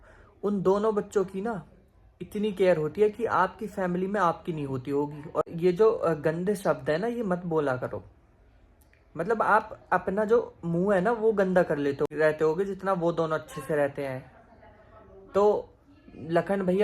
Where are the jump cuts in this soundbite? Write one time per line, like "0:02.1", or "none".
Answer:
0:05.4
0:12.1